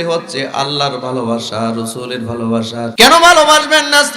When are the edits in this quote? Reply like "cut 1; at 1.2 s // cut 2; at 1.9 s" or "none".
cut 1; at 2.9 s